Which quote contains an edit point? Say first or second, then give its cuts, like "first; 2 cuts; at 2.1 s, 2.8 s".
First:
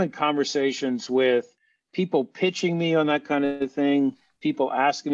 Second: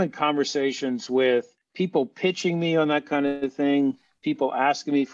second; 1 cut; at 1.6 s